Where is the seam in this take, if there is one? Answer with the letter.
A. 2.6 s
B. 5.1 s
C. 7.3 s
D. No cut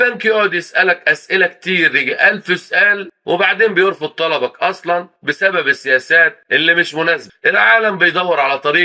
C